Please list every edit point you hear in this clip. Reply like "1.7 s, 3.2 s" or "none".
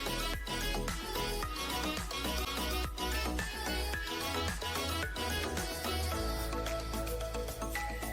2.4 s